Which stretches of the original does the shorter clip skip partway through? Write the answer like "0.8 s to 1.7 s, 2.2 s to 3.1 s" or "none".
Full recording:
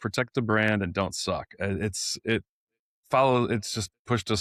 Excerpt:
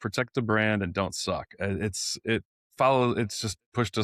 2.6 s to 2.9 s